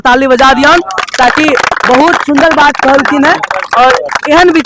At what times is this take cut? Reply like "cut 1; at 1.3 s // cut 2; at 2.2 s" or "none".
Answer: none